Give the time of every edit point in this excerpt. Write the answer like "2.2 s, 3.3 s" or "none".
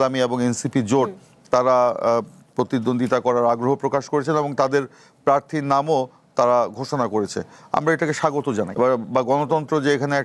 8.7 s

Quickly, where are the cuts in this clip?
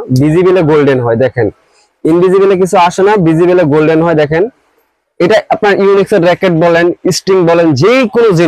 none

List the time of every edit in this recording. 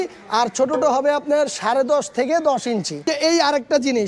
3.0 s

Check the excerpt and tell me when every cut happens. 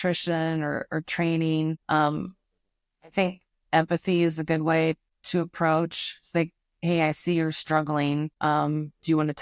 1.8 s, 5.1 s, 8.3 s

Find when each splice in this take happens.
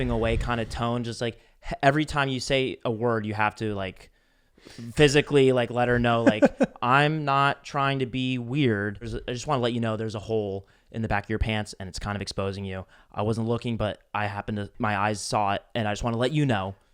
9.1 s, 14.7 s

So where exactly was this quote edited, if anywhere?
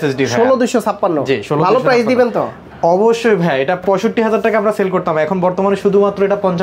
none

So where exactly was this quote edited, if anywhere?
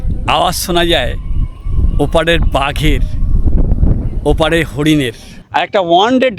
5.3 s

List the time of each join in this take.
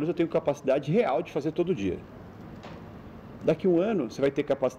none

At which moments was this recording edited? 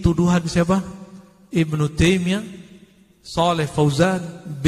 none

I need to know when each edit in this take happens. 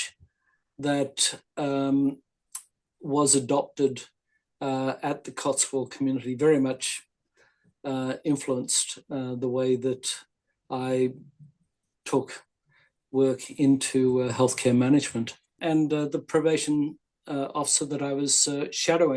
15.6 s

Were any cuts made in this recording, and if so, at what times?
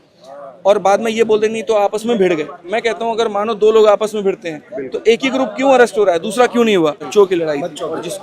7.0 s

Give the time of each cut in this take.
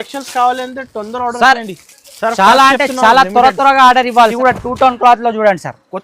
4.3 s

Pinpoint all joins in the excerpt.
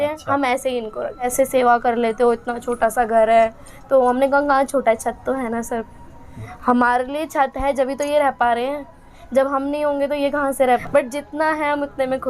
1.3 s, 10.8 s

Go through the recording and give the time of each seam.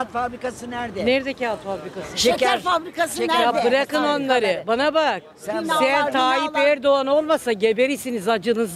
none

